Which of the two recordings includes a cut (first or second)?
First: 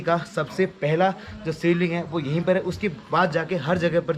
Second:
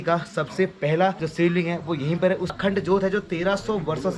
second